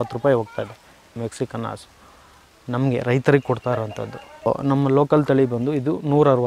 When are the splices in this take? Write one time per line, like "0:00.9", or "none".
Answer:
0:01.2
0:04.5